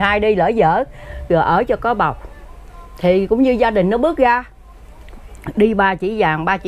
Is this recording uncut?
yes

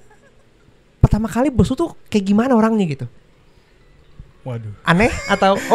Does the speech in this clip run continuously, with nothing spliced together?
yes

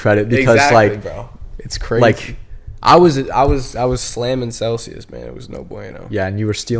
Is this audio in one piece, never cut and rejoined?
yes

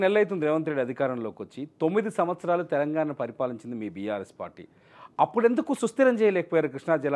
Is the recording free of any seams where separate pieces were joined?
yes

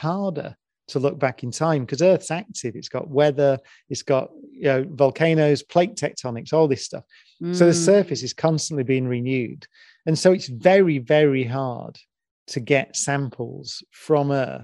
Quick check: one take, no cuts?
yes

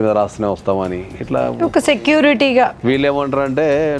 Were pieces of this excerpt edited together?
yes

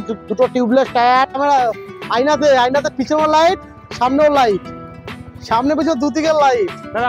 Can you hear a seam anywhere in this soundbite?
yes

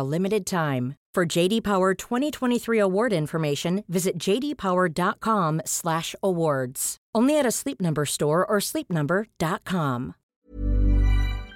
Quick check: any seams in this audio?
yes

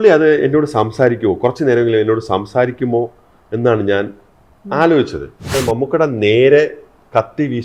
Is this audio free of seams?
no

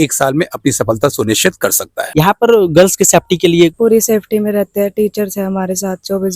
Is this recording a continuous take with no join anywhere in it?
no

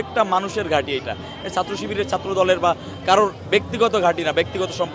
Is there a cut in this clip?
no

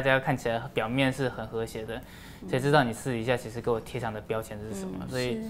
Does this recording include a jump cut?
no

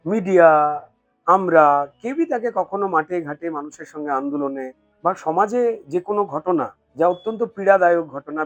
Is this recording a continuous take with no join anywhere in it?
no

